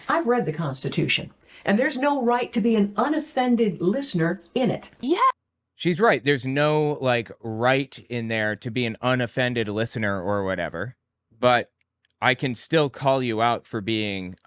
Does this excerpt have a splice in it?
no; 0 cuts

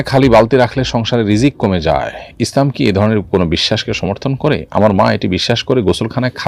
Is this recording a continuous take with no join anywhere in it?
yes; 0 cuts

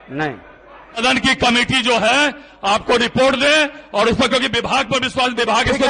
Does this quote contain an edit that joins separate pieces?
yes; 1 cut; at 1.0 s

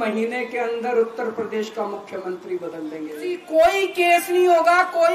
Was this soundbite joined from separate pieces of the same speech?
yes; 1 cut; at 3.4 s

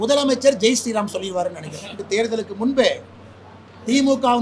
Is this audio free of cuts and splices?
no; 1 cut; at 2.0 s

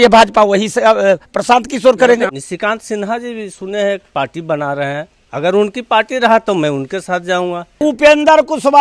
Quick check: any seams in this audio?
yes; 3 cuts; at 2.4 s, 5.2 s, 7.8 s

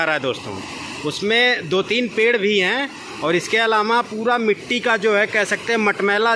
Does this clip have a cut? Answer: no; 0 cuts

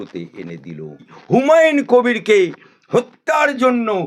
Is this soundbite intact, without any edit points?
no; 1 cut; at 1.2 s

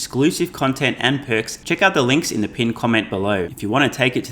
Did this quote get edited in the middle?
yes; 2 cuts; at 1.6 s, 3.5 s

